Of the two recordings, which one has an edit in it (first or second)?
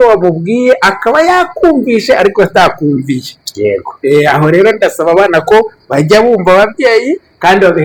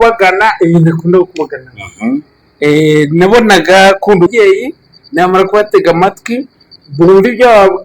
second